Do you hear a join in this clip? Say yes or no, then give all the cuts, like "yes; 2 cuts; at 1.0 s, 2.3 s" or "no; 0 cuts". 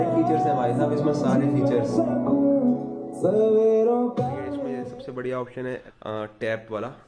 yes; 2 cuts; at 4.6 s, 5.9 s